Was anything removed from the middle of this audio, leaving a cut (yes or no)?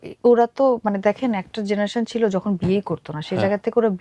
no